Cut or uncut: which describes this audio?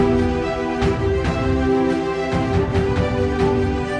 uncut